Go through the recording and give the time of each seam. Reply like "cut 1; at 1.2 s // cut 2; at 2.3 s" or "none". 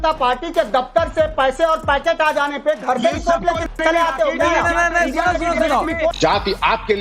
cut 1; at 4.8 s // cut 2; at 6.1 s